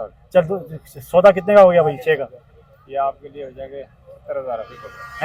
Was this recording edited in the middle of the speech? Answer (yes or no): no